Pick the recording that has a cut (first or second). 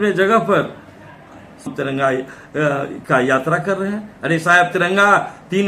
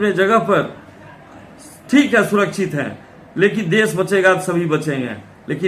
first